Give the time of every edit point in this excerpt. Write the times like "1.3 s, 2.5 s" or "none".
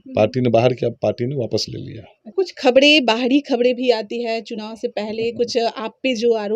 2.3 s

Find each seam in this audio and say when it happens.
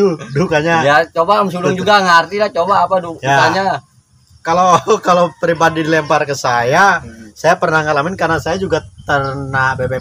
none

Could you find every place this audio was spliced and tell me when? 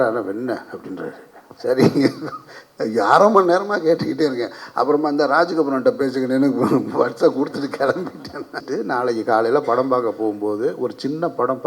8.6 s

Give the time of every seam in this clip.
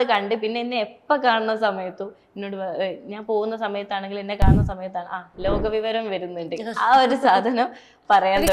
none

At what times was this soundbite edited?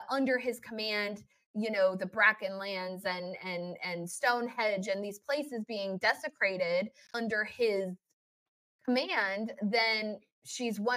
7.1 s

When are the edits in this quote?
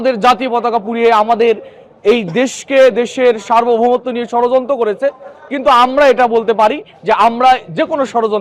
none

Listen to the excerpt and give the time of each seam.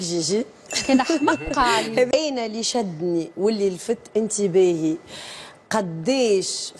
2.1 s

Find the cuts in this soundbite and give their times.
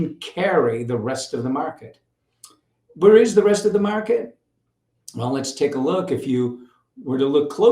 none

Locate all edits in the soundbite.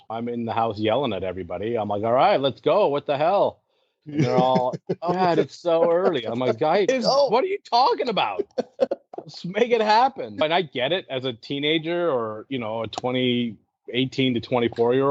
none

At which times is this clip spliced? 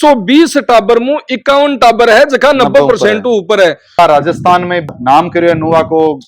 4.0 s

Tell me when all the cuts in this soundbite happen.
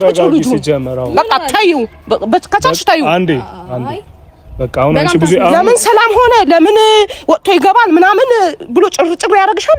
none

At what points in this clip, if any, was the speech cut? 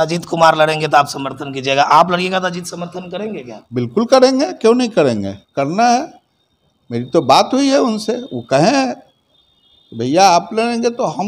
none

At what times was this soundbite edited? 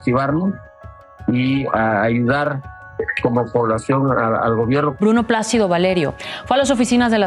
4.9 s

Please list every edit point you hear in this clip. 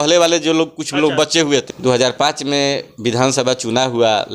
1.6 s

